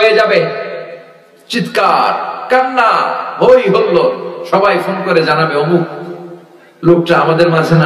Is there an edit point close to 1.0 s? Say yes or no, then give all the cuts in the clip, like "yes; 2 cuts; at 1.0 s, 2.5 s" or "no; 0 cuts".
no; 0 cuts